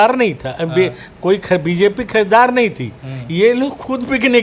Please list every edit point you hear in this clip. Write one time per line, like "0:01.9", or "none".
none